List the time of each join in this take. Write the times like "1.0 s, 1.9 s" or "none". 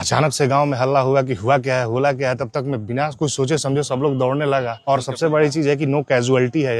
4.8 s